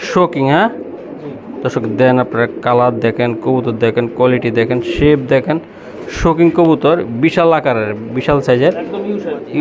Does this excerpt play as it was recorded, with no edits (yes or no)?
yes